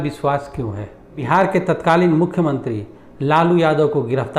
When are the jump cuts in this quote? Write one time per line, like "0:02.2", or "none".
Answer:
0:01.2